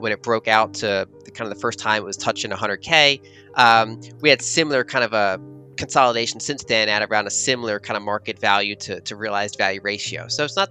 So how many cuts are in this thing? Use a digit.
0